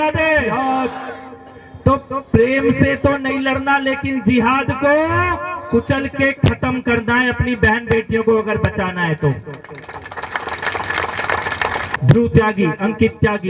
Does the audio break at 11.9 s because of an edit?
yes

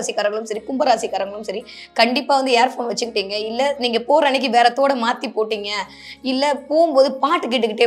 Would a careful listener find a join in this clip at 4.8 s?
no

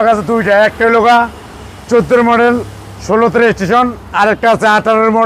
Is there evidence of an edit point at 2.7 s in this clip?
no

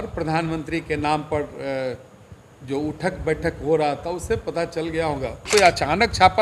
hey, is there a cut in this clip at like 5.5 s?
yes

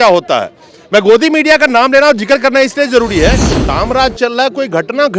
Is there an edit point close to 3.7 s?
yes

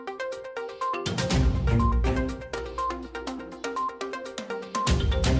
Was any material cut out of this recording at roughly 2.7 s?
no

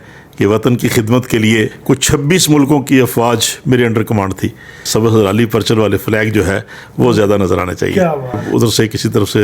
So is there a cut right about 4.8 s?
yes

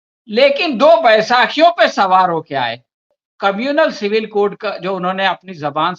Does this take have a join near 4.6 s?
no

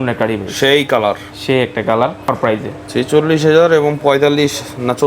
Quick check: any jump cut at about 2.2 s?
yes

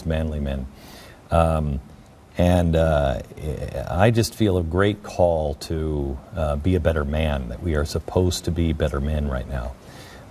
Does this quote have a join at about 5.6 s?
yes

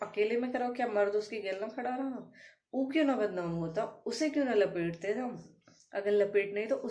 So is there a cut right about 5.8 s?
no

